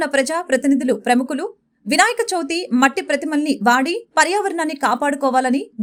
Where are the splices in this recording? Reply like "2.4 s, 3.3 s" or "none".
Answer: none

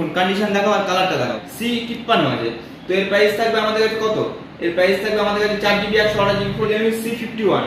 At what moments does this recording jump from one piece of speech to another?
1.5 s, 6.7 s

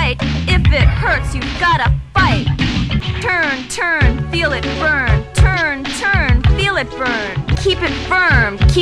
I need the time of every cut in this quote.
3.1 s, 7.6 s

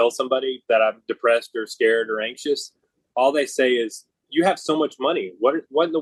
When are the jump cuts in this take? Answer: none

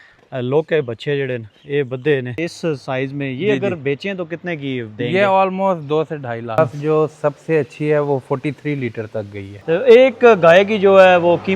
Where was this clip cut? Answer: 2.5 s, 6.6 s, 9.5 s

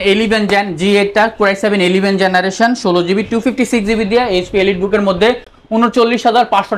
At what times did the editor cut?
none

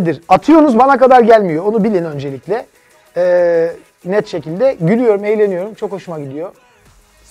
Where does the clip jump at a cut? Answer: none

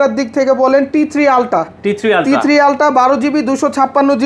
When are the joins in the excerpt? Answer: none

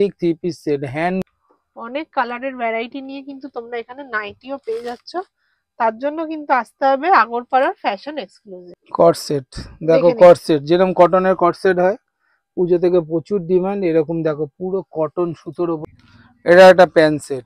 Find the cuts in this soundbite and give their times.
1.2 s, 8.7 s, 15.8 s

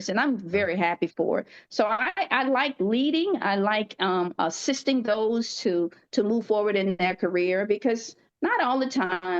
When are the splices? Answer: none

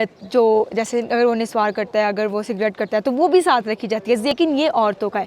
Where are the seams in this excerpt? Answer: 4.3 s

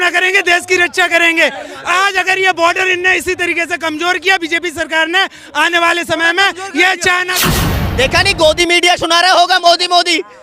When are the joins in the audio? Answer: 7.4 s

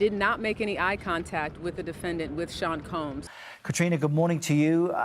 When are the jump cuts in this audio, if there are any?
3.3 s

